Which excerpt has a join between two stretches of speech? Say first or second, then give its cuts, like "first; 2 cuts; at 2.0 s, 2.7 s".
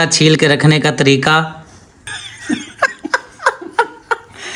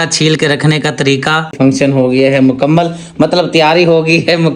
second; 1 cut; at 1.5 s